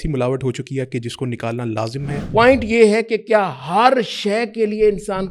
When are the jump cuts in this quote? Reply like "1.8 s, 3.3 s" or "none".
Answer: 2.2 s